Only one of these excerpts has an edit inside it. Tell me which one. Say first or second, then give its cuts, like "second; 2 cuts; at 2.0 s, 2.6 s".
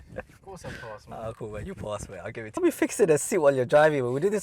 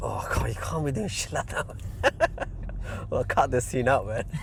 first; 1 cut; at 2.6 s